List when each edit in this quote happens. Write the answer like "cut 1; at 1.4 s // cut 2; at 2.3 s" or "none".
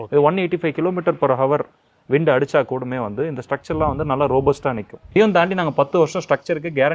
cut 1; at 5.0 s